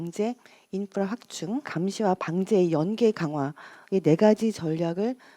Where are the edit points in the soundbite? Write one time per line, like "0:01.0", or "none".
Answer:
0:01.7

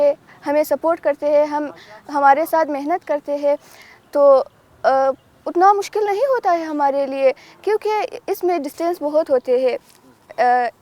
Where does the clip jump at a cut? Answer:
none

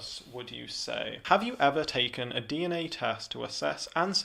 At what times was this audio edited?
0:01.2

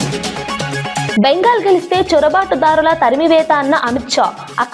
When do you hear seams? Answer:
0:01.1

